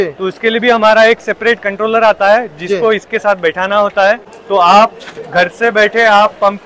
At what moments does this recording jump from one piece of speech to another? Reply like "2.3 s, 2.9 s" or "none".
4.3 s